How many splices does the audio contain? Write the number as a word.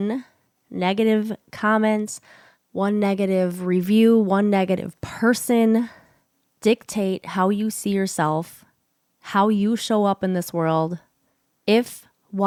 zero